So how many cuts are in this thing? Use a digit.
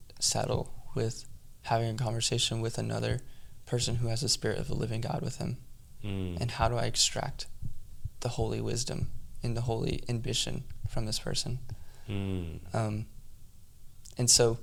0